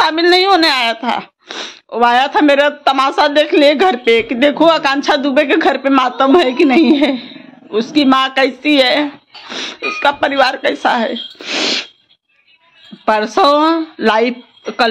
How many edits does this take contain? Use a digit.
0